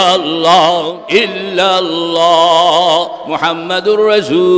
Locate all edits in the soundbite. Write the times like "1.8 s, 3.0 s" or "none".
1.0 s